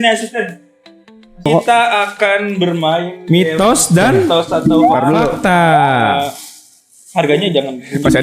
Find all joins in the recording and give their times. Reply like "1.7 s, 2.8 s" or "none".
1.5 s